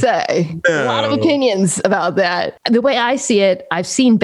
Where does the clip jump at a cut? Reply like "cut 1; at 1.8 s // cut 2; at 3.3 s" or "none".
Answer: cut 1; at 2.5 s